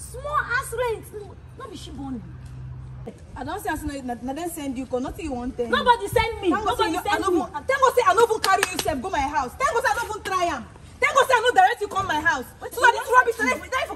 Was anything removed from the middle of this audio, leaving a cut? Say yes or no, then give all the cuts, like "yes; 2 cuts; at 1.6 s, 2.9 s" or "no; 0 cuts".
yes; 1 cut; at 3.2 s